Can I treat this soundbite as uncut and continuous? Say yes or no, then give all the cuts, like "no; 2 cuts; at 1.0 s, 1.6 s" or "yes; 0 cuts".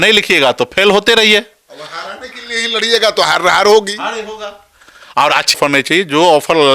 no; 1 cut; at 5.6 s